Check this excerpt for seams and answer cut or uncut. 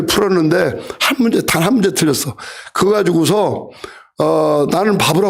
uncut